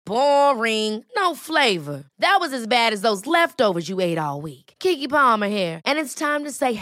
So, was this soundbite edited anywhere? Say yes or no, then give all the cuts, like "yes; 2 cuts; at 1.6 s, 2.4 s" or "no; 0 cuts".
no; 0 cuts